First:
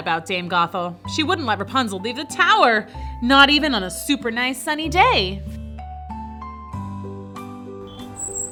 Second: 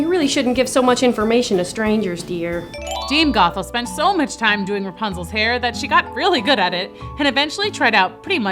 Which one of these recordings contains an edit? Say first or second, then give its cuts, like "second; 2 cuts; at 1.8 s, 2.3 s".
second; 1 cut; at 2.7 s